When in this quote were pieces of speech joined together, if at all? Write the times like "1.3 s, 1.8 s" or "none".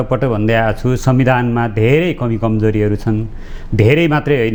none